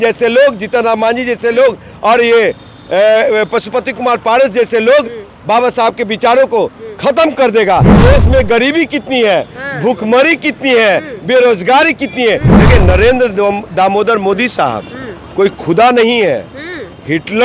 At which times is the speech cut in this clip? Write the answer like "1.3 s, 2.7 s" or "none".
7.9 s, 12.5 s

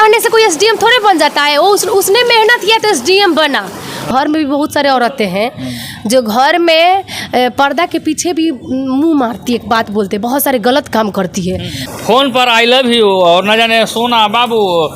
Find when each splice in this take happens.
4.1 s, 11.8 s

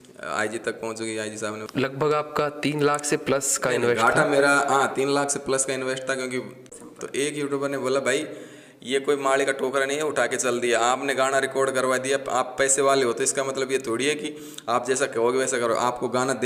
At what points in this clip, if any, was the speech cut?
1.6 s, 6.6 s

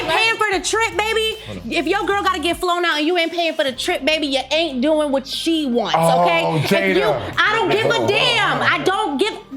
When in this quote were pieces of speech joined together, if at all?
none

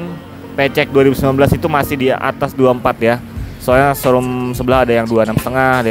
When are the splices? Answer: none

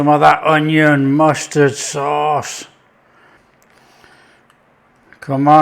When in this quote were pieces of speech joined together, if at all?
none

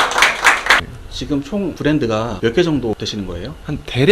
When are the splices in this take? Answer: 0.8 s, 2.3 s, 3.0 s

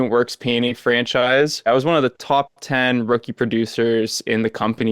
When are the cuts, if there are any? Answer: 1.7 s

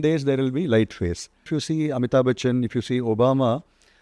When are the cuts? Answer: 1.5 s

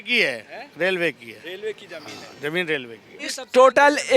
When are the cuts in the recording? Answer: 3.3 s

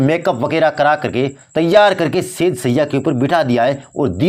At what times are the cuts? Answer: none

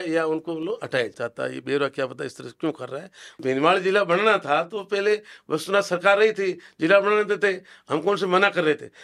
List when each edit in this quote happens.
1.2 s, 3.4 s

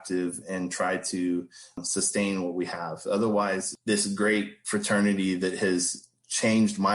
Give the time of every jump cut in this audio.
4.6 s

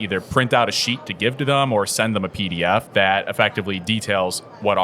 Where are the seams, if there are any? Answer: 2.9 s

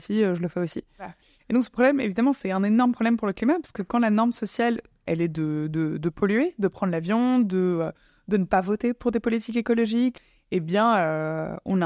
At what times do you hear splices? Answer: 1.2 s, 5.0 s, 10.2 s

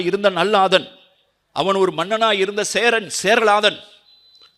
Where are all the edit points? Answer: none

